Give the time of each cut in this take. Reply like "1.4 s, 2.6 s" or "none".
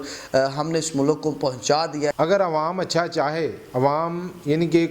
2.2 s